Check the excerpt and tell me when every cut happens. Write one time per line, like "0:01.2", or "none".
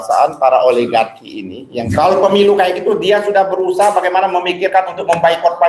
0:01.9